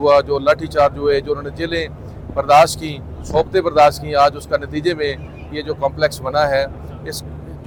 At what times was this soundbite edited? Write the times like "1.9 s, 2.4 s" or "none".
none